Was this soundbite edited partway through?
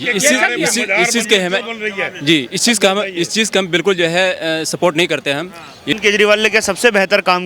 yes; 1 cut; at 5.9 s

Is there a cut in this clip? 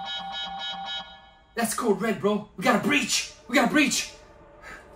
no; 0 cuts

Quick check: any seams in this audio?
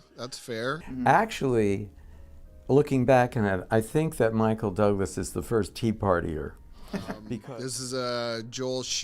yes; 1 cut; at 7.3 s

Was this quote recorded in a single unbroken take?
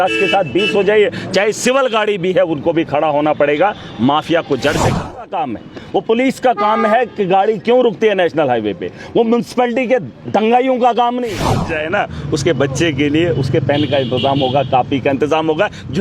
no; 2 cuts; at 5.2 s, 11.7 s

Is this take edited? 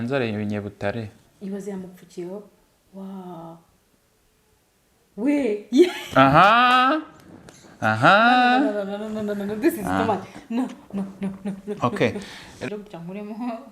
yes; 1 cut; at 12.7 s

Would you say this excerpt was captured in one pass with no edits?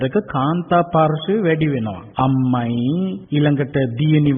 no; 2 cuts; at 2.0 s, 3.2 s

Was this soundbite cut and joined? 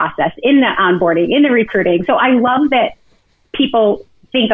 no; 0 cuts

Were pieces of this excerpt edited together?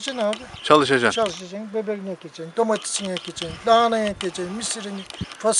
no; 0 cuts

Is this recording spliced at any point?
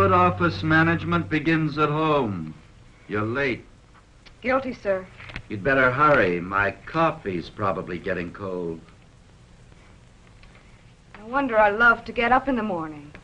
yes; 1 cut; at 8.3 s

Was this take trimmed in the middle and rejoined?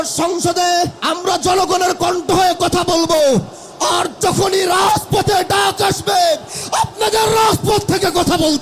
yes; 1 cut; at 1.0 s

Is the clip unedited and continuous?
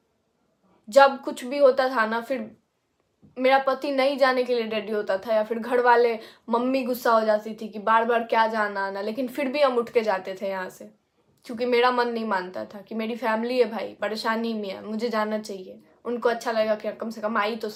yes; 0 cuts

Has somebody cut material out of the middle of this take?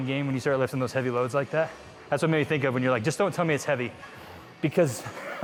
no; 0 cuts

